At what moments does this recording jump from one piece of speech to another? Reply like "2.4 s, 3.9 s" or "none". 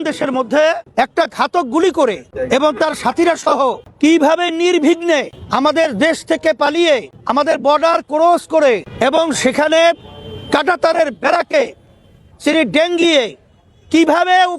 0.8 s, 2.3 s, 3.9 s, 5.4 s, 7.1 s, 8.9 s